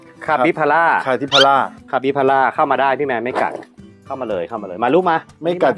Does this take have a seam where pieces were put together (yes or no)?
no